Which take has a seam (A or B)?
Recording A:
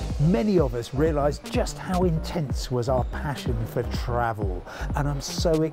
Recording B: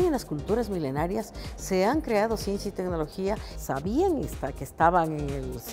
B